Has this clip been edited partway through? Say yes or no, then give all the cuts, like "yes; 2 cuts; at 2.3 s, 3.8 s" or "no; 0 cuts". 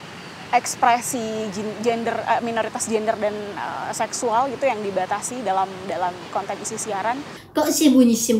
yes; 1 cut; at 7.3 s